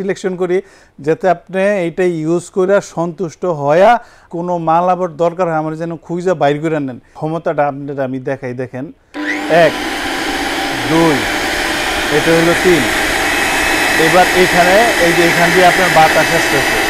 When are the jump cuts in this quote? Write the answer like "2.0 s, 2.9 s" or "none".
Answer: 4.2 s, 7.1 s, 9.0 s